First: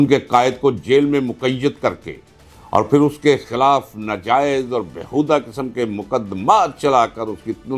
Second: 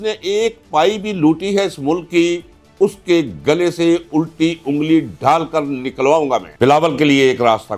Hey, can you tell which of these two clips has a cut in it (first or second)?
second